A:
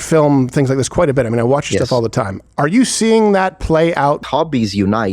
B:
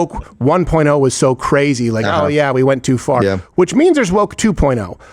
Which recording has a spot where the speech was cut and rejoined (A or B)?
A